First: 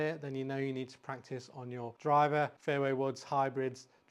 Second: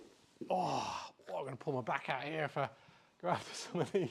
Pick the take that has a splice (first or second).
first